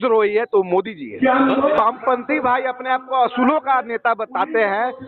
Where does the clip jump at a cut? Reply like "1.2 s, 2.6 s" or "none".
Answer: 1.8 s